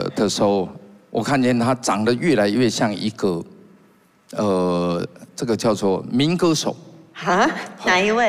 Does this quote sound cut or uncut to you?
uncut